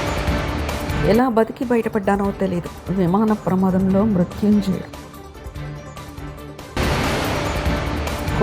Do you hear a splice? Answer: yes; 1 cut; at 0.9 s

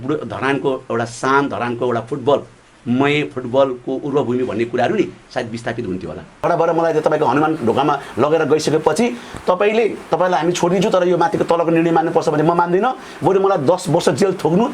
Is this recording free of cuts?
no; 1 cut; at 6.4 s

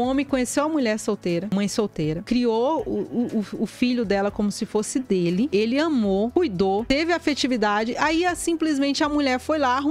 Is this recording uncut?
no; 1 cut; at 2.2 s

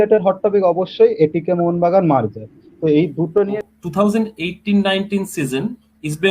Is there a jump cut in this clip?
yes; 1 cut; at 3.7 s

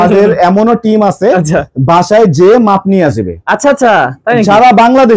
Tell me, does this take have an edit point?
no; 0 cuts

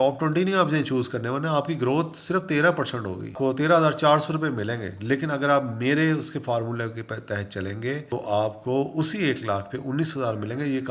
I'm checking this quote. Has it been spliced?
yes; 2 cuts; at 3.3 s, 8.1 s

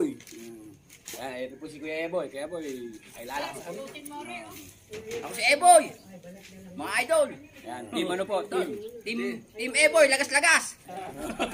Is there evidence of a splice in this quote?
no; 0 cuts

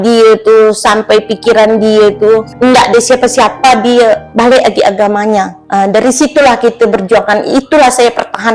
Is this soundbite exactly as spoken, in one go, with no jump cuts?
no; 3 cuts; at 2.5 s, 4.3 s, 5.6 s

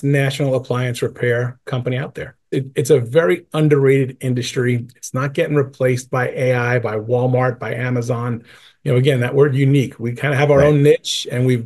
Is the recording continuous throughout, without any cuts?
no; 1 cut; at 2.5 s

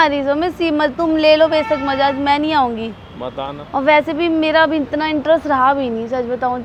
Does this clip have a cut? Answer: no; 0 cuts

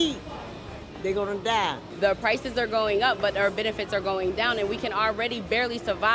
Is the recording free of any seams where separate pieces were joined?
no; 1 cut; at 1.9 s

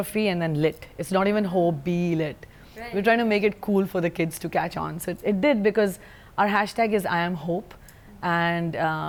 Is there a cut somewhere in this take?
no; 0 cuts

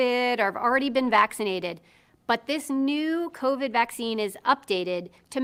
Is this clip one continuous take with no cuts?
yes; 0 cuts

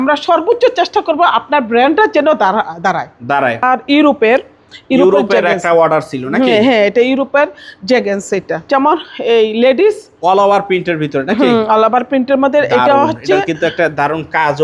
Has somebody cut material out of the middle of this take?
yes; 2 cuts; at 3.6 s, 8.7 s

